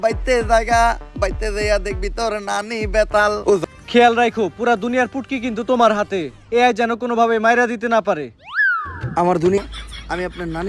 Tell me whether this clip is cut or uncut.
cut